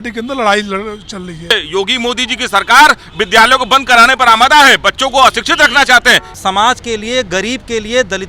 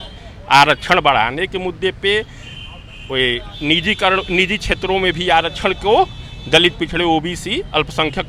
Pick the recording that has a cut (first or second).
first